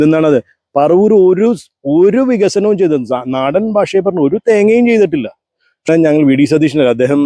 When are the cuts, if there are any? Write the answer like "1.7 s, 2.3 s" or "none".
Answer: 5.9 s